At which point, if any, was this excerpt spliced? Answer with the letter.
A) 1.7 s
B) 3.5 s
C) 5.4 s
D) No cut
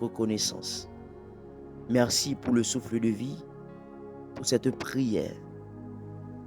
C